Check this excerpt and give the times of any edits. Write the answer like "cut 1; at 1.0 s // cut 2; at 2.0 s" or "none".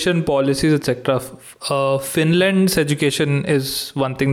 none